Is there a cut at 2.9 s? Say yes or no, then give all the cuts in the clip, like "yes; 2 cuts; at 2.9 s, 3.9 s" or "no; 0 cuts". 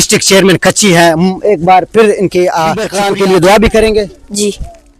yes; 1 cut; at 2.9 s